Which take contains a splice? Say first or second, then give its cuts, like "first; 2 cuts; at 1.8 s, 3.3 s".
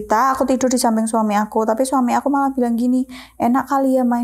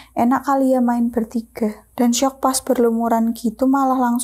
second; 1 cut; at 1.9 s